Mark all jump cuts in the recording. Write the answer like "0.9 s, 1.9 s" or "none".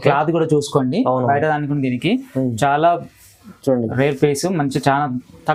none